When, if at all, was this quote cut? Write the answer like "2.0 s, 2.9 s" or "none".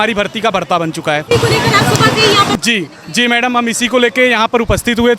none